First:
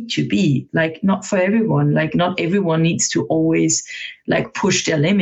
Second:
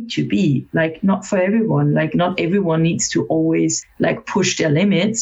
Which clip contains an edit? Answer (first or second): second